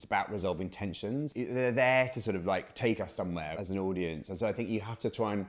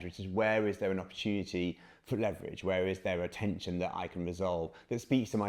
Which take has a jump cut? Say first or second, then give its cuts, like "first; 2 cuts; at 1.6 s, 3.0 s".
first; 1 cut; at 1.3 s